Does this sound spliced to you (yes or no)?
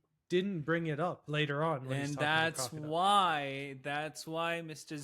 yes